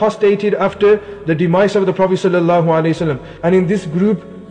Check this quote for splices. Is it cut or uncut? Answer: cut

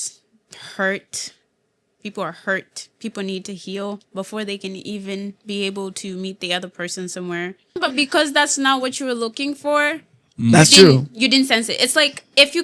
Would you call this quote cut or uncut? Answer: cut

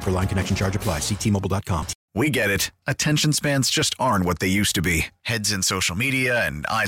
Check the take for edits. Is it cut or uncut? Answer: cut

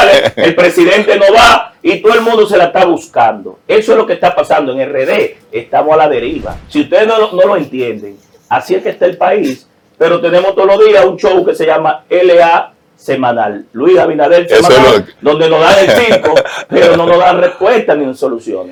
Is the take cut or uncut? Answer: uncut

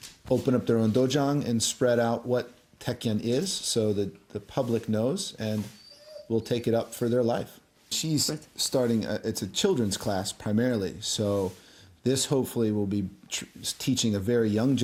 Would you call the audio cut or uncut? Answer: uncut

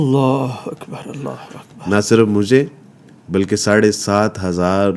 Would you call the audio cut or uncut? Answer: uncut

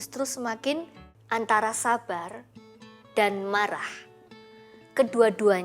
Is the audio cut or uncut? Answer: cut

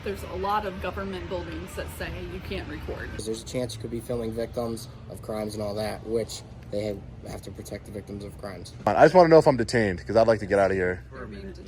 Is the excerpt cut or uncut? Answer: cut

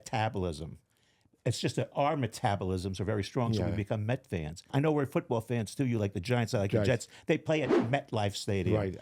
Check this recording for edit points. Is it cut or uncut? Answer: cut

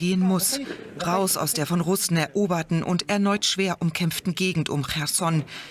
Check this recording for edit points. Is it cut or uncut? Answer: uncut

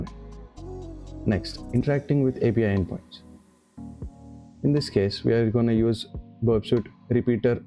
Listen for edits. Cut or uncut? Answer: cut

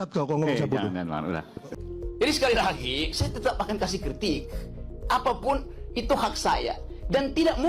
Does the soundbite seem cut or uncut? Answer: cut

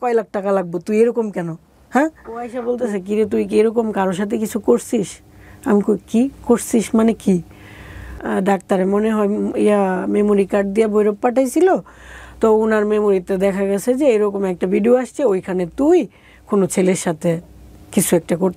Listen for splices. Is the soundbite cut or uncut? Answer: cut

